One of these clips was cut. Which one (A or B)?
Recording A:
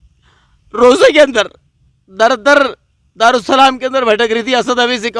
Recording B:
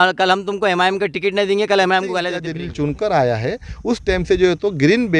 B